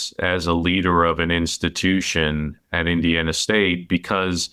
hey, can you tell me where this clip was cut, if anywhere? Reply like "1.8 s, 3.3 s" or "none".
2.6 s